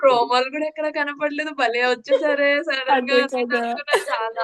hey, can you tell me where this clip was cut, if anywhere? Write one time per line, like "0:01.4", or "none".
none